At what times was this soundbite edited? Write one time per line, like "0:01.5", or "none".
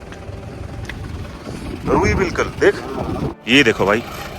0:03.3